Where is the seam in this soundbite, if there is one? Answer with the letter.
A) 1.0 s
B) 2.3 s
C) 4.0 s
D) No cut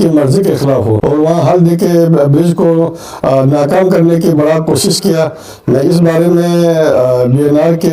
A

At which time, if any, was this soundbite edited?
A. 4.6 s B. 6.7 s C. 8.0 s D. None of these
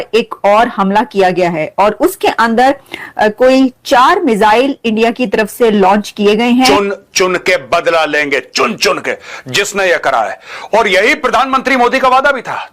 B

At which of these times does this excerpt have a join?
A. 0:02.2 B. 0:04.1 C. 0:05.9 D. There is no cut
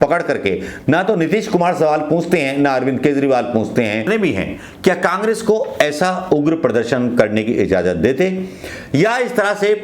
B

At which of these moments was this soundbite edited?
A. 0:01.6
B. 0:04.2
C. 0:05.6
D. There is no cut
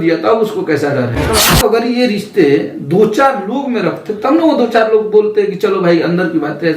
A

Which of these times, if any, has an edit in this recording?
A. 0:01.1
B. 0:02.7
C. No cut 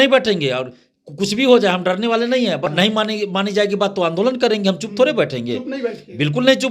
B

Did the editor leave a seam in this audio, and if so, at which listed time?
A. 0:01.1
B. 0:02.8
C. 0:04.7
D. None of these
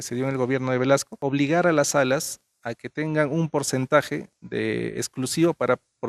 A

